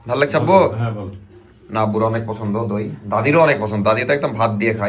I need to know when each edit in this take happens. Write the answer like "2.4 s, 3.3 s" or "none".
none